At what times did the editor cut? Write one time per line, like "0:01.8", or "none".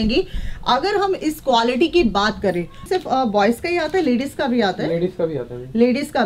0:02.8